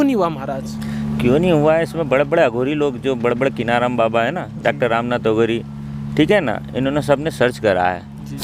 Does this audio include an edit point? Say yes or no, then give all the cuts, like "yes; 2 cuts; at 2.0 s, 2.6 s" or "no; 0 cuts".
no; 0 cuts